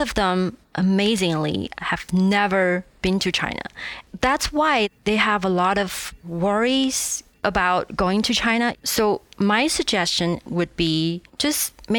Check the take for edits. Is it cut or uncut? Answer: cut